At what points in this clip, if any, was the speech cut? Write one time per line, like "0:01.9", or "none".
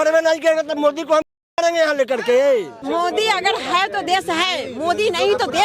0:02.8